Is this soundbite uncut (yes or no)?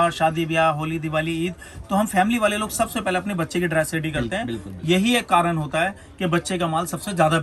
yes